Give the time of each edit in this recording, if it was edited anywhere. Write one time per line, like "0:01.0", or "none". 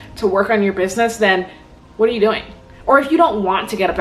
none